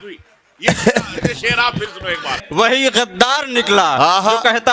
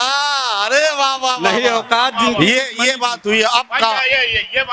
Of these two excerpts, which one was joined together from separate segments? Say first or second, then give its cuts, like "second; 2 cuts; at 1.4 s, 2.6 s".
first; 1 cut; at 2.3 s